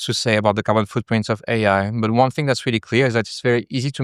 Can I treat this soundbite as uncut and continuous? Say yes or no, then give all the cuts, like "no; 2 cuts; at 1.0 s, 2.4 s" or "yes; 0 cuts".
yes; 0 cuts